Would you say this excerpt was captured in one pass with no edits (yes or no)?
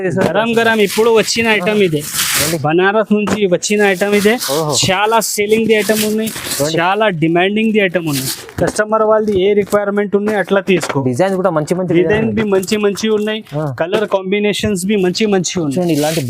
yes